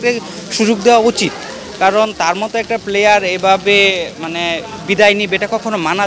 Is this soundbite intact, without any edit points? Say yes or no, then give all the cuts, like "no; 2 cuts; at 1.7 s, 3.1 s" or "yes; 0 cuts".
yes; 0 cuts